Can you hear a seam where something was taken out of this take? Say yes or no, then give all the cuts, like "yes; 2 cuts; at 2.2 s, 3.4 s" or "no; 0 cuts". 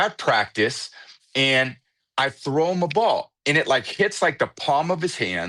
no; 0 cuts